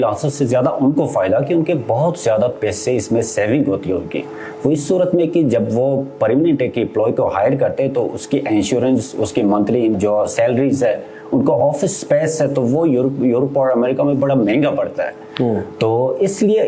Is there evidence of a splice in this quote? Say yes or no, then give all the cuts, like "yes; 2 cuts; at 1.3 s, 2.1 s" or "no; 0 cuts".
no; 0 cuts